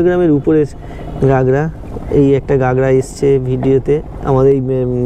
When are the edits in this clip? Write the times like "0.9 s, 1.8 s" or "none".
none